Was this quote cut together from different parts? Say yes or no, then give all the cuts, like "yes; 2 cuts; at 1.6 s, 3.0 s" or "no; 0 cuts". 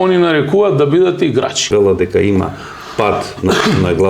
yes; 1 cut; at 1.6 s